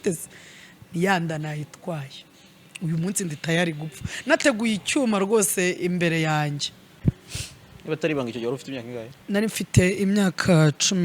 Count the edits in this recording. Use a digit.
1